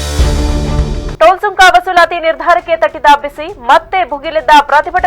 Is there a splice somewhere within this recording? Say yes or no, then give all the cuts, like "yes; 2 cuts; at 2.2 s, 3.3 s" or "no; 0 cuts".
no; 0 cuts